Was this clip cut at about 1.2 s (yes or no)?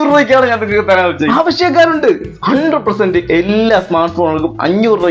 yes